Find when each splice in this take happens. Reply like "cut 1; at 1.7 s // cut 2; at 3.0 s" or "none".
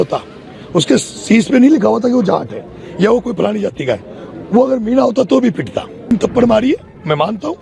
cut 1; at 6.1 s